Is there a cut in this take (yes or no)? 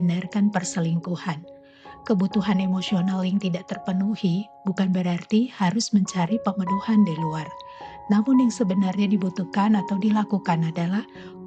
no